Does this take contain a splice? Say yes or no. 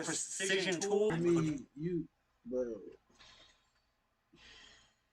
yes